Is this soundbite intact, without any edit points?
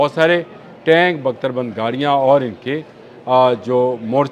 yes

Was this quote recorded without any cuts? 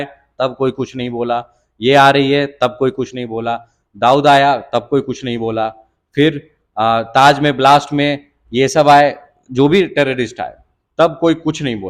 yes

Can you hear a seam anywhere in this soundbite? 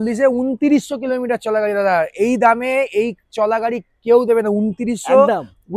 no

